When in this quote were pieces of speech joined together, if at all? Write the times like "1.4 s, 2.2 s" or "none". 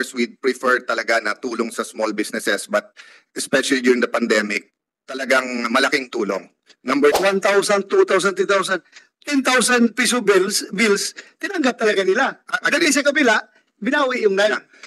7.2 s